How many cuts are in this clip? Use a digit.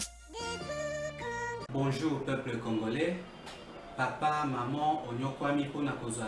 1